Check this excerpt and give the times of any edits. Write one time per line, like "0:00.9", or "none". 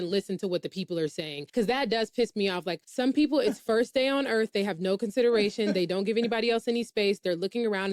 0:01.4
0:02.8